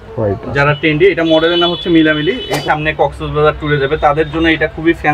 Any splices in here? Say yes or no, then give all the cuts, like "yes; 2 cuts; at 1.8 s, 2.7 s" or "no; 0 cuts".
yes; 1 cut; at 2.6 s